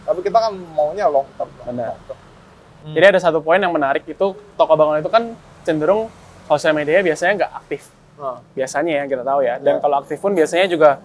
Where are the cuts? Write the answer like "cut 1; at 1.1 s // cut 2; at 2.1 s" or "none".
none